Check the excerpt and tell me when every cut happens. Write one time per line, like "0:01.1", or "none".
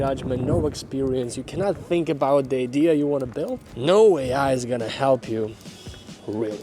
0:03.6